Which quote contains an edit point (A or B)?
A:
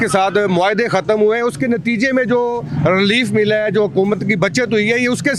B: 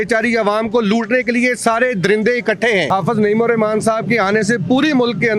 B